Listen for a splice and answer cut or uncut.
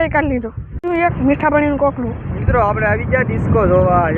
uncut